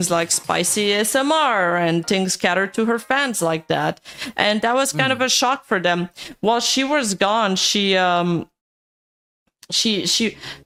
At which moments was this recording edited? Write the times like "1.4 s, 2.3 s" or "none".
none